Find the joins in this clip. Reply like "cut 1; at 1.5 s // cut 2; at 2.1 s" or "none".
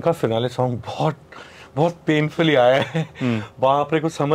none